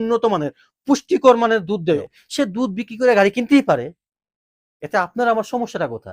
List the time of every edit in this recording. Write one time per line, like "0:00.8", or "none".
0:02.0